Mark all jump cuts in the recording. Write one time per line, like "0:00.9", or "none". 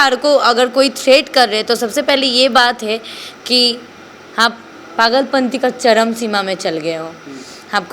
none